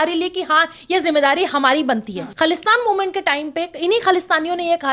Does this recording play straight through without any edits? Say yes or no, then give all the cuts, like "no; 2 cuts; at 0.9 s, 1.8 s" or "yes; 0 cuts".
no; 1 cut; at 2.3 s